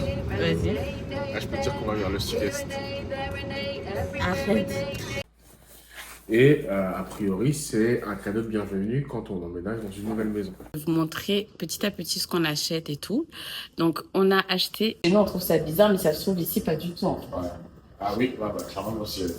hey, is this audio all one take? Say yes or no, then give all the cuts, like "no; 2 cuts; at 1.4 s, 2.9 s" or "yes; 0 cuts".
no; 3 cuts; at 5.2 s, 10.7 s, 15.0 s